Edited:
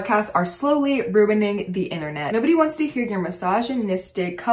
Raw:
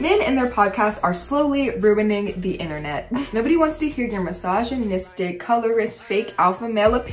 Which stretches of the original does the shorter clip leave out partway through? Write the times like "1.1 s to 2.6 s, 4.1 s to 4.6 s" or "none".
2.9 s to 3.3 s